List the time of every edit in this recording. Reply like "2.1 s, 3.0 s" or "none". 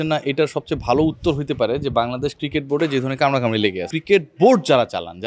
3.9 s